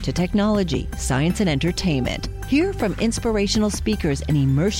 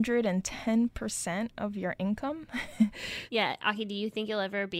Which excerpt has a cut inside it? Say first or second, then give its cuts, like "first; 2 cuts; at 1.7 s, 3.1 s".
second; 1 cut; at 3.1 s